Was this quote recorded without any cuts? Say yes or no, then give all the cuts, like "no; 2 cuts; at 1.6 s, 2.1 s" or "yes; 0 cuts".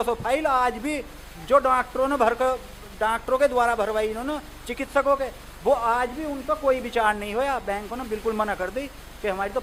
yes; 0 cuts